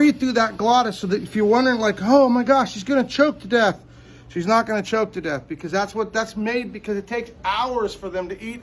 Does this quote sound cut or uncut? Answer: uncut